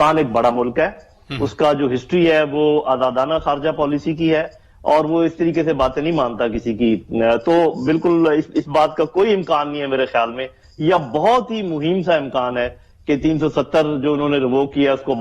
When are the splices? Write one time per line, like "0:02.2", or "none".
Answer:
none